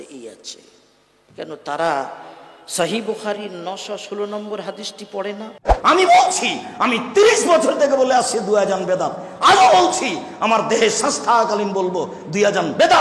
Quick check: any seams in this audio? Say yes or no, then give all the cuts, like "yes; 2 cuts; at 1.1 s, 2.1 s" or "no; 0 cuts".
yes; 1 cut; at 5.7 s